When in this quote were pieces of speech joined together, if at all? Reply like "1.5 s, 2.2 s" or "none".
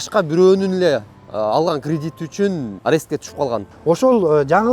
2.7 s, 3.7 s

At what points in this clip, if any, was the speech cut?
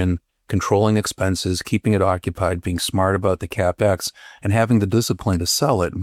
none

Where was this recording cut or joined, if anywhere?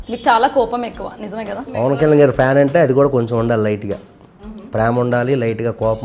1.7 s

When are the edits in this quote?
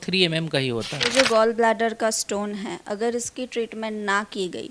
1.1 s

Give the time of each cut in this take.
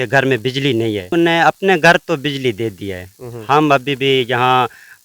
1.1 s

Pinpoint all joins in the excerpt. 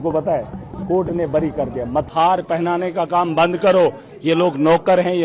2.1 s

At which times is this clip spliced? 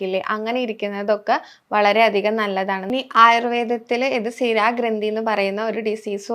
2.8 s

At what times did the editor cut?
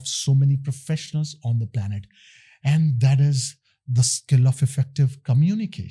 none

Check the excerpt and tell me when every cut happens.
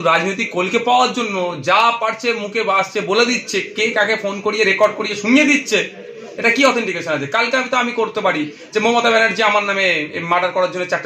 none

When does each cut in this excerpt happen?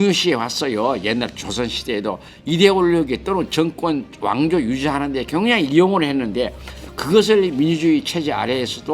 2.3 s

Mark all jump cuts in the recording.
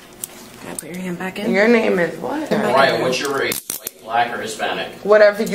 2.5 s

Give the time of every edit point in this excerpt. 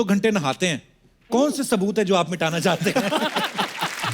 none

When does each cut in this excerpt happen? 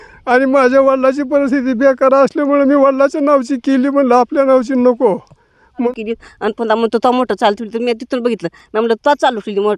5.9 s

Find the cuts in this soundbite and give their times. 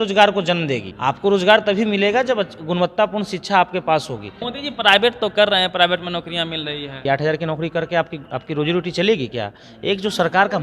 0.9 s, 4.5 s, 7.0 s

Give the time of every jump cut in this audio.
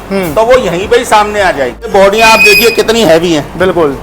1.9 s

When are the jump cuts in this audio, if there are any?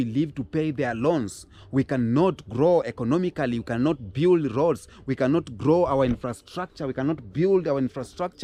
none

